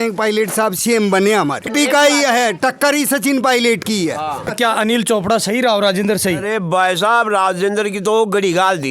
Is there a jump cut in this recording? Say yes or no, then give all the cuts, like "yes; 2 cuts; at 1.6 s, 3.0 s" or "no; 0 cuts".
yes; 2 cuts; at 1.7 s, 4.4 s